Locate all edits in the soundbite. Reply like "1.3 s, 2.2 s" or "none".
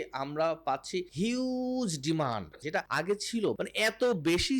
1.1 s, 2.9 s, 3.6 s